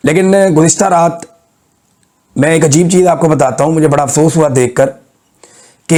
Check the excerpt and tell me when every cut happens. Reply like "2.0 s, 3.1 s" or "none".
none